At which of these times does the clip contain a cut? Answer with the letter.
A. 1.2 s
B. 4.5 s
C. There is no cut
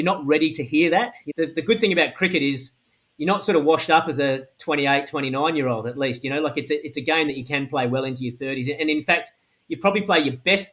A